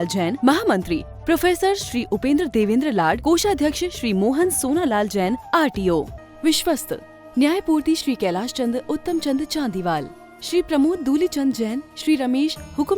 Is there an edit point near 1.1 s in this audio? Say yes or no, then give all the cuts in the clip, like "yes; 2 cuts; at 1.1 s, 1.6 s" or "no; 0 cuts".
no; 1 cut; at 6.2 s